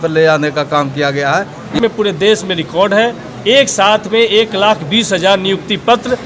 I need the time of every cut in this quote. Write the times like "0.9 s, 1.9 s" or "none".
1.8 s

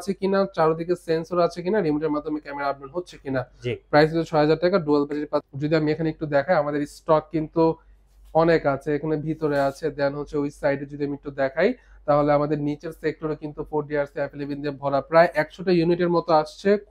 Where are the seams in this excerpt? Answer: 5.5 s

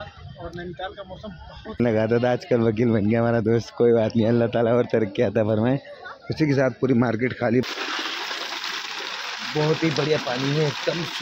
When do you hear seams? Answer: 1.8 s, 7.6 s

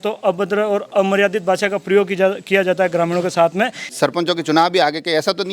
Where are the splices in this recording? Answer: 3.8 s

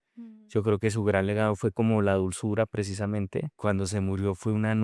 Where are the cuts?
3.6 s

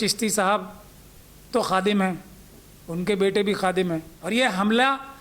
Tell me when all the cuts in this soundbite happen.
4.1 s

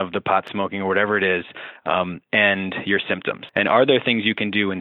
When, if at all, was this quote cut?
3.4 s

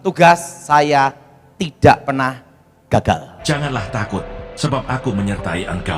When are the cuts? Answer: 3.3 s

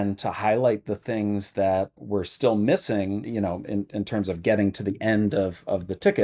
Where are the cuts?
none

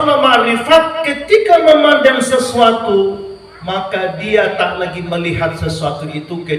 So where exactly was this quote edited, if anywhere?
none

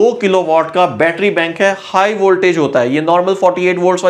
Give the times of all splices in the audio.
none

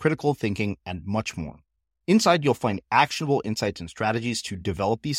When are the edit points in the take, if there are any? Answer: none

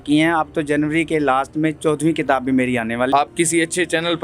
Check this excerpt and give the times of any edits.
3.1 s

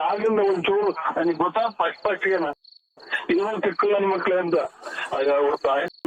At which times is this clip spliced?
none

